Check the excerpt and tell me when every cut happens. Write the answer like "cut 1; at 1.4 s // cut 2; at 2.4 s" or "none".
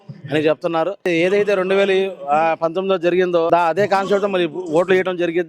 cut 1; at 1.1 s // cut 2; at 3.5 s